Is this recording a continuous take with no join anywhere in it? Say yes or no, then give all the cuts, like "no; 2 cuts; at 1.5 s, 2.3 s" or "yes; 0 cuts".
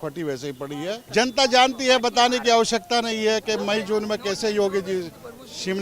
no; 1 cut; at 1.0 s